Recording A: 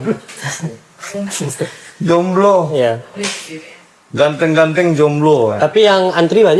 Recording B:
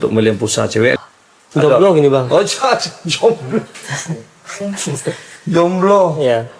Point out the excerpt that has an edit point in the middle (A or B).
B